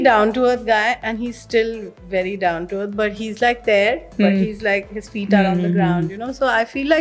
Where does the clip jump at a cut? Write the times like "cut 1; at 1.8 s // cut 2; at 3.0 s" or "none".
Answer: none